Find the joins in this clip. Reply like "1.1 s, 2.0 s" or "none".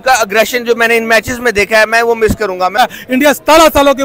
2.8 s